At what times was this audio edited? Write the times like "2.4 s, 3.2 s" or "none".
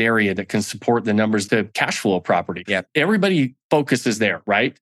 1.5 s, 2.8 s